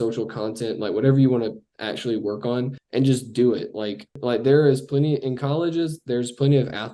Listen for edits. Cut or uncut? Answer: cut